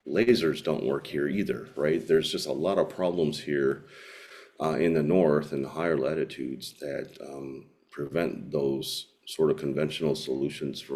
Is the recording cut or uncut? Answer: uncut